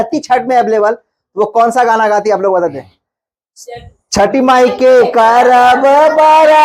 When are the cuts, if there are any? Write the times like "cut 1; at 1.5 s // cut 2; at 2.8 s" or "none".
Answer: none